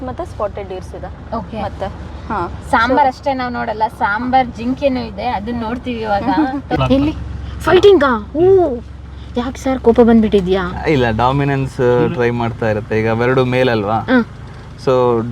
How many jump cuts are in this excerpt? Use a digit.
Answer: 1